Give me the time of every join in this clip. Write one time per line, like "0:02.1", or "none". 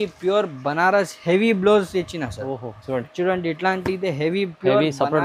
none